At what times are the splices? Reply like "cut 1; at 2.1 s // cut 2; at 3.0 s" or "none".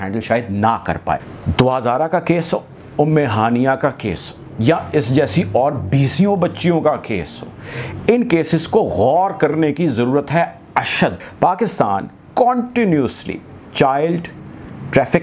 cut 1; at 1.3 s // cut 2; at 11.2 s